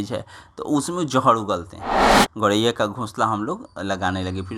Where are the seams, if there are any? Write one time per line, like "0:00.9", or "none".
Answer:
0:02.1